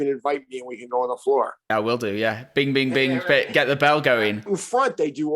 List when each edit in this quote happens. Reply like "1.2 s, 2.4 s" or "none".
4.4 s